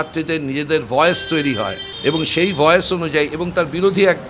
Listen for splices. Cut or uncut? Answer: cut